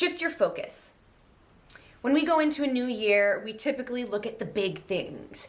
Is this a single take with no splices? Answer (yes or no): yes